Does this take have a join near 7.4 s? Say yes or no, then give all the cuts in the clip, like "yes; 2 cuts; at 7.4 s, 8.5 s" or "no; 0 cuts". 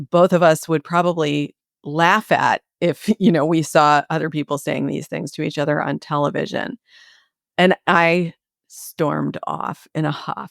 yes; 1 cut; at 7.4 s